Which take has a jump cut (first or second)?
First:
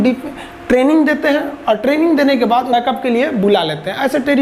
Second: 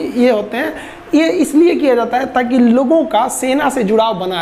first